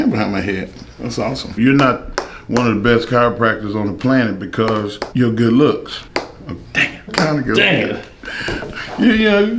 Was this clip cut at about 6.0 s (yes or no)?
yes